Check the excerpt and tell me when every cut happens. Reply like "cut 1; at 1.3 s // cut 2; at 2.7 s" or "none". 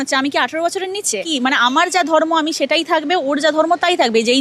cut 1; at 1.1 s